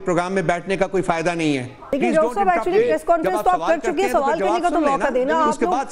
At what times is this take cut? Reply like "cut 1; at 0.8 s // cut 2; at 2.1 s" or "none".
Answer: cut 1; at 1.9 s

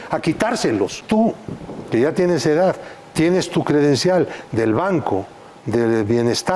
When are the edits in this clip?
cut 1; at 1.0 s

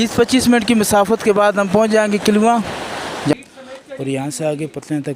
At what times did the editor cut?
cut 1; at 3.3 s

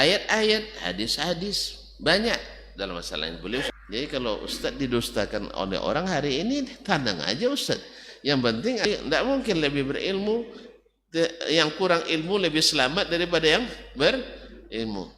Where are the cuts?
cut 1; at 3.7 s // cut 2; at 8.8 s

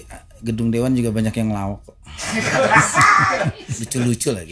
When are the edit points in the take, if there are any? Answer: none

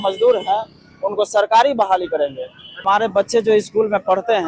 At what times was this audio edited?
cut 1; at 2.8 s

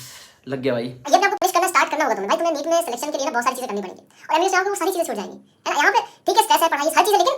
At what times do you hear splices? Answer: cut 1; at 1.1 s

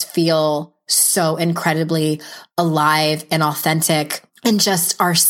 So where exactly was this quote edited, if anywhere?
cut 1; at 4.2 s

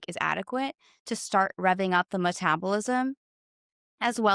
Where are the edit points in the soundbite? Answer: none

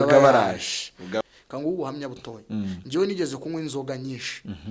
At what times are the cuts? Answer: cut 1; at 1.2 s

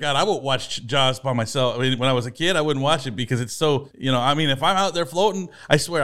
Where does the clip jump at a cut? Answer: none

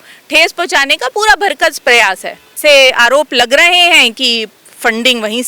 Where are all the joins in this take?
cut 1; at 2.5 s

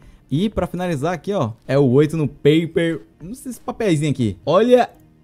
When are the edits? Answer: cut 1; at 1.6 s // cut 2; at 4.4 s

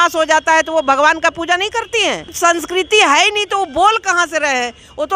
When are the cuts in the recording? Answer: cut 1; at 2.3 s

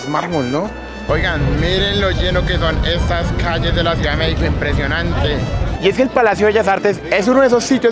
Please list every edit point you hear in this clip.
cut 1; at 1.0 s // cut 2; at 5.6 s

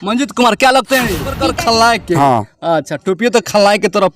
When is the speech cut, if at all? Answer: cut 1; at 1.4 s

